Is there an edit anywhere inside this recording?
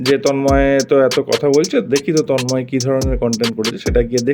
no; 0 cuts

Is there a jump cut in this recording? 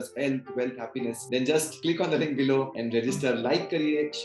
yes; 3 cuts; at 1.2 s, 1.7 s, 2.8 s

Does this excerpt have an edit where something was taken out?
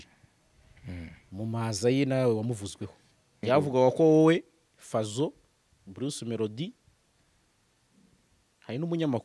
yes; 1 cut; at 3.4 s

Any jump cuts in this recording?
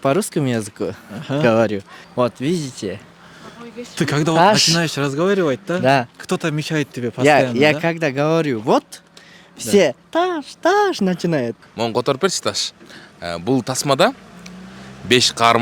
yes; 2 cuts; at 2.0 s, 11.6 s

